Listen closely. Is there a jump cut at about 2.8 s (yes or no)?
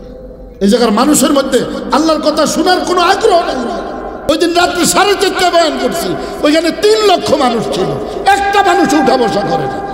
no